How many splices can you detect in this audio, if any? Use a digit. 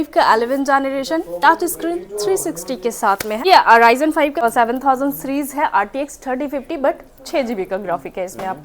2